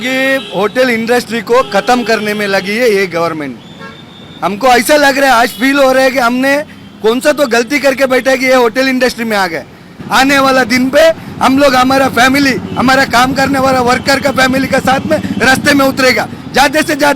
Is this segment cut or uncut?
cut